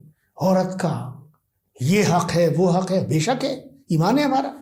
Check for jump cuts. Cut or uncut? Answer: uncut